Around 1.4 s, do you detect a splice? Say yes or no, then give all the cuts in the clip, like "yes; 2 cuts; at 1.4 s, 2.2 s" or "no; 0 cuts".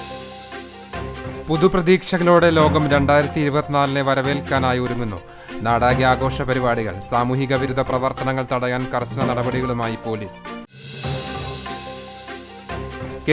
no; 0 cuts